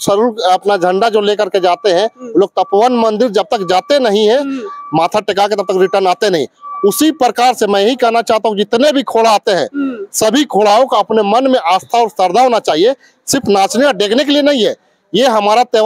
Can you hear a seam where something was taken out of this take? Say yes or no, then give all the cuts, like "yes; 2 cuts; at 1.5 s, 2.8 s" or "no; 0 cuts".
no; 0 cuts